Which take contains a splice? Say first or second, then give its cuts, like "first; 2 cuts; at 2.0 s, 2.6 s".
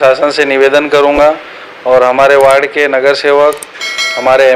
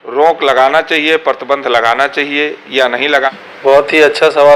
second; 1 cut; at 3.3 s